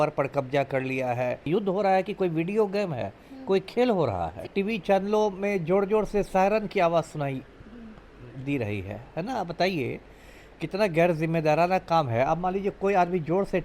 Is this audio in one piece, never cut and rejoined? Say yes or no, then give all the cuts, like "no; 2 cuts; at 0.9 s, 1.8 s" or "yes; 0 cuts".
no; 2 cuts; at 1.5 s, 4.5 s